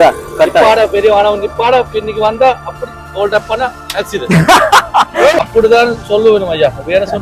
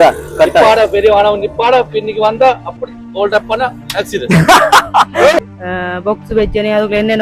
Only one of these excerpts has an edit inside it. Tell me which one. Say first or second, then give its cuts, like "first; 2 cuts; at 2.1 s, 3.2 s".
second; 1 cut; at 5.5 s